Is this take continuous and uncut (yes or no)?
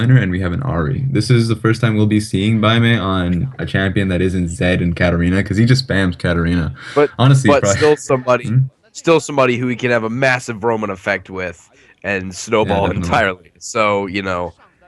yes